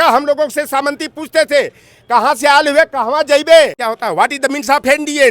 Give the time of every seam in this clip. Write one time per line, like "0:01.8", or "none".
0:03.8

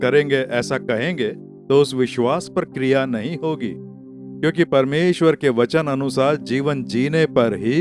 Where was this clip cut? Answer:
none

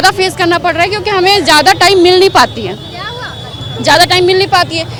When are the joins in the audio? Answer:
none

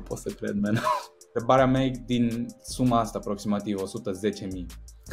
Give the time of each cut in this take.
0:01.4

